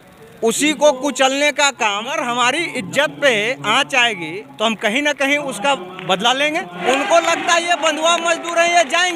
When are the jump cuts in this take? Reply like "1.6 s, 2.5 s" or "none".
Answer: 2.2 s, 6.8 s